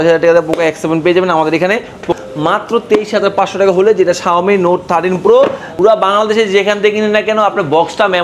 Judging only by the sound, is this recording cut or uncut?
cut